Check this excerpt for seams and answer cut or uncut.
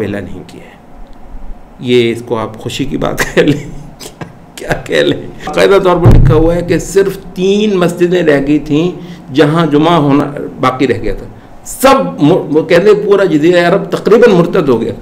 cut